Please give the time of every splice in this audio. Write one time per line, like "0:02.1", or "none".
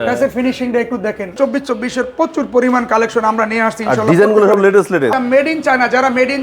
0:01.3
0:05.1